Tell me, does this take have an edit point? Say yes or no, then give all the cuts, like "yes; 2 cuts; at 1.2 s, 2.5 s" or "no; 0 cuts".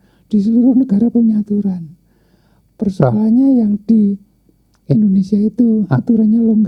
no; 0 cuts